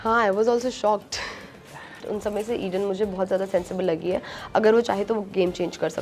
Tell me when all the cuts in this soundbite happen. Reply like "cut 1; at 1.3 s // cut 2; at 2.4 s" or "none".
cut 1; at 2.0 s